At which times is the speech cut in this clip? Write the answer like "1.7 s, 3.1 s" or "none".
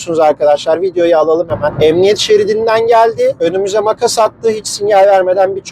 1.7 s